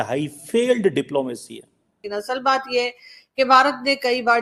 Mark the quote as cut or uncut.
cut